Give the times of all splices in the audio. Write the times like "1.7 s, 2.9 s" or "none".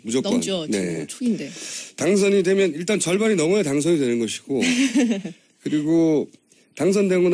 4.9 s

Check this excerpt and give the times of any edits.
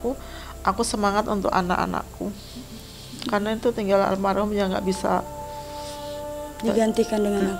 none

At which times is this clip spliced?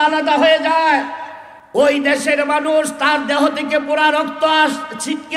none

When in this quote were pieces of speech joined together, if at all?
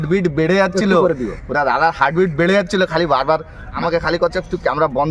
3.8 s

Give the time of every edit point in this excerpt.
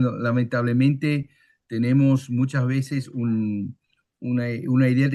none

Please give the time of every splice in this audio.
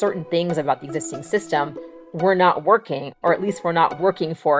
none

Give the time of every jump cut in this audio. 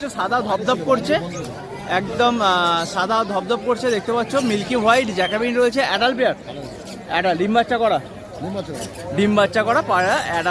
none

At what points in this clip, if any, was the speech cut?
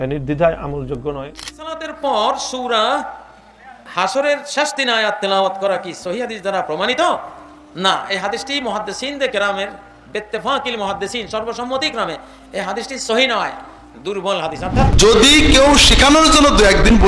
1.6 s, 14.8 s

